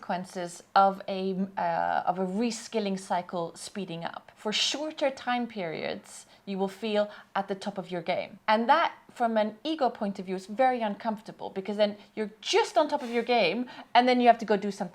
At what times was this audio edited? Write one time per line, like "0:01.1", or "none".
0:04.2
0:08.3